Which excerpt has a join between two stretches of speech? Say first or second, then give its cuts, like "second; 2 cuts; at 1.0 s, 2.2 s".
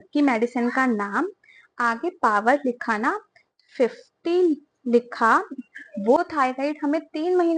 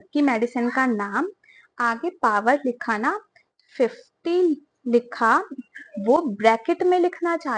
first; 1 cut; at 6.2 s